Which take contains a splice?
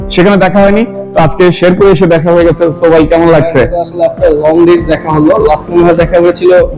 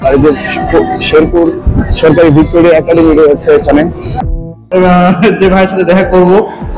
second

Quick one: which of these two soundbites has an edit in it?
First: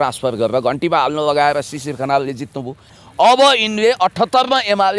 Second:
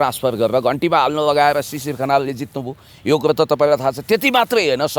first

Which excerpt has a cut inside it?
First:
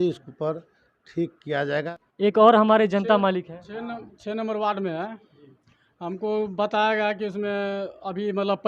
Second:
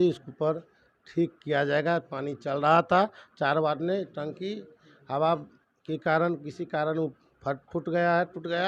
first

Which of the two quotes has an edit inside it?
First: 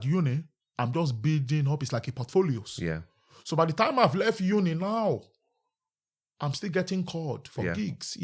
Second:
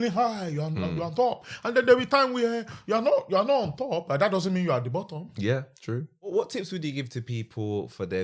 second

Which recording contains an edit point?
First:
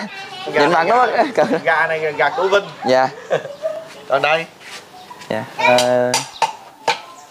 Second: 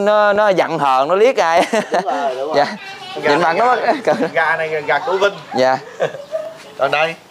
first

